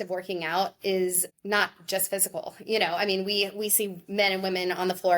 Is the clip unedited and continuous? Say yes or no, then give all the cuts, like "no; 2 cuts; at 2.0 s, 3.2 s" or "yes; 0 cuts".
no; 1 cut; at 1.3 s